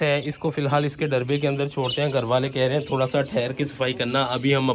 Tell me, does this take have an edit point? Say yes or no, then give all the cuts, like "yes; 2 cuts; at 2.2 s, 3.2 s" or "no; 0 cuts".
no; 0 cuts